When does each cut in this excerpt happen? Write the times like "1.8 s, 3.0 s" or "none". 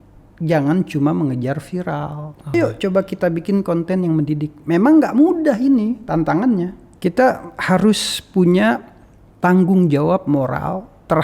2.5 s, 6.8 s